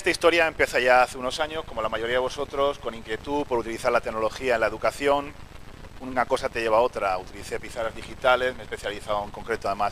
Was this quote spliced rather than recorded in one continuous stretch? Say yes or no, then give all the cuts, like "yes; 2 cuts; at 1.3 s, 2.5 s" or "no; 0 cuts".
no; 0 cuts